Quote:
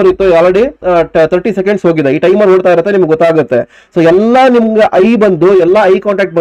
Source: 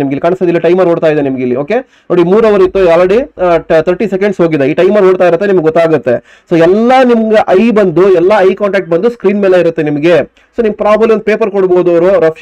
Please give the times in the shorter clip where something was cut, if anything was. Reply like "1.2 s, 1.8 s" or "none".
none